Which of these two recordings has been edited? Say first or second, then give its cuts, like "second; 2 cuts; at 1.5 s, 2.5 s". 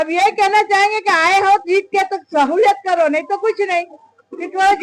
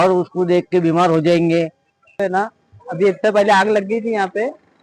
second; 1 cut; at 2.2 s